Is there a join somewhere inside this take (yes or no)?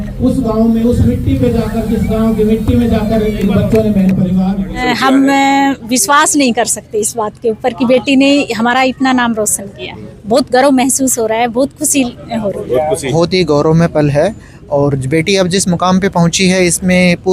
yes